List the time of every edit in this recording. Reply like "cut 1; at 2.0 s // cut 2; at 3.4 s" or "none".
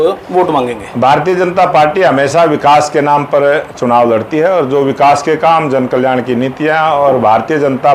none